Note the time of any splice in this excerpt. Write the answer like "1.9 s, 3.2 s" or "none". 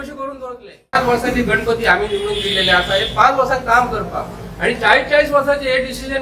0.9 s